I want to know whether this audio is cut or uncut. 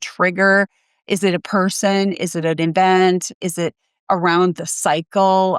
cut